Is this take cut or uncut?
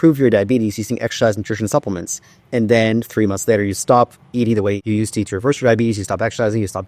cut